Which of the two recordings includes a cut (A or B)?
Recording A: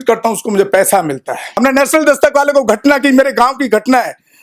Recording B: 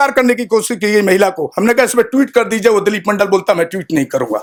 A